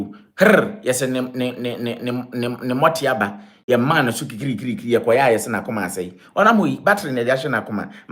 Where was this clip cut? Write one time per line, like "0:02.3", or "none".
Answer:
none